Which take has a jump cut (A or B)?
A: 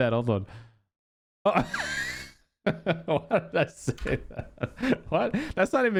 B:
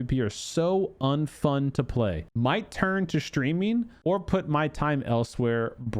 B